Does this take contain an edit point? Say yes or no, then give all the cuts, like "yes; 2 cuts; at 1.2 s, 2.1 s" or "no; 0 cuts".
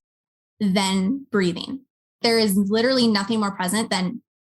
yes; 1 cut; at 2.2 s